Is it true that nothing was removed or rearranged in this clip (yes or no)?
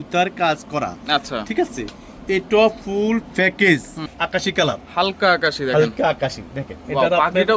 no